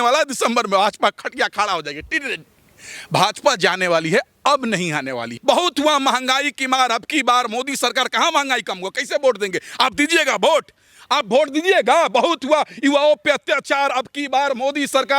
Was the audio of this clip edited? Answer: yes; 1 cut; at 5.3 s

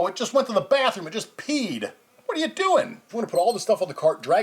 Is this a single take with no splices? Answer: no; 1 cut; at 3.1 s

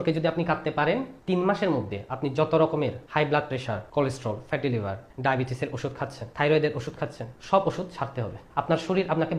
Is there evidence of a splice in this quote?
no; 0 cuts

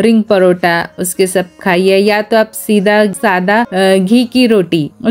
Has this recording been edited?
no; 0 cuts

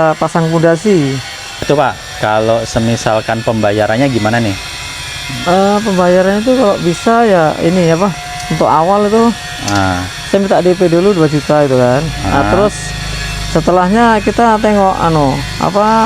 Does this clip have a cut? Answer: yes; 1 cut; at 1.6 s

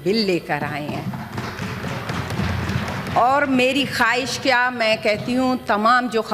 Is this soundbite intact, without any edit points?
yes; 0 cuts

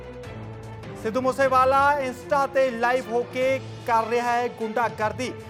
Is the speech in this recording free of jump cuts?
yes; 0 cuts

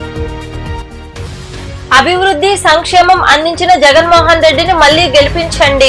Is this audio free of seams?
no; 1 cut; at 1.9 s

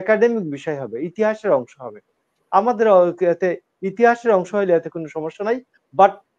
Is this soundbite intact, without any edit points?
yes; 0 cuts

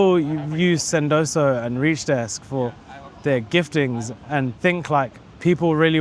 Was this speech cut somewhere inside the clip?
yes; 1 cut; at 4.5 s

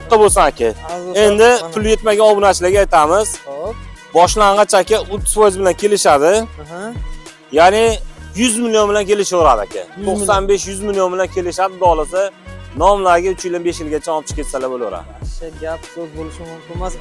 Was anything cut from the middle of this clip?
no; 0 cuts

